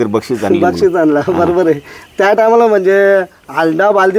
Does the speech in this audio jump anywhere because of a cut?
no; 0 cuts

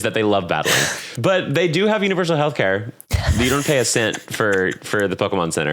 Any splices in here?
yes; 1 cut; at 1.0 s

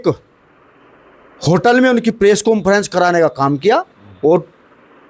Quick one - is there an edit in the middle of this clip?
no; 0 cuts

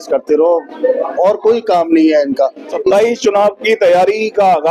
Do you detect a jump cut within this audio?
yes; 1 cut; at 2.7 s

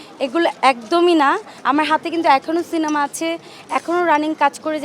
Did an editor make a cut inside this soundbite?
yes; 1 cut; at 1.5 s

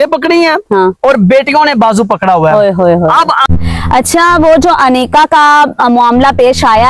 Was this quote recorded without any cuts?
no; 1 cut; at 3.4 s

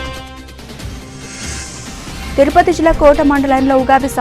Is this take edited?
no; 0 cuts

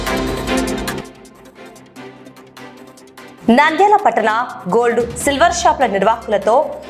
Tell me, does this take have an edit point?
yes; 2 cuts; at 1.1 s, 3.4 s

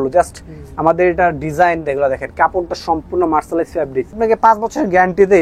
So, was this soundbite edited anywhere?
yes; 1 cut; at 4.1 s

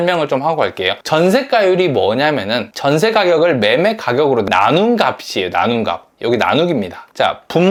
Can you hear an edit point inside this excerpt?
no; 0 cuts

